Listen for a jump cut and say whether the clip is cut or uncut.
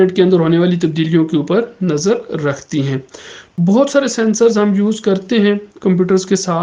cut